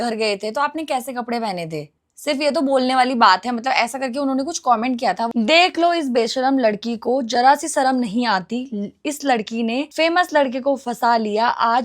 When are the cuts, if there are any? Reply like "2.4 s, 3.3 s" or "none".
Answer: 5.3 s